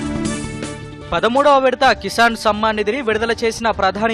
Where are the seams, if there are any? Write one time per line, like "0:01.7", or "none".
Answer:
0:00.9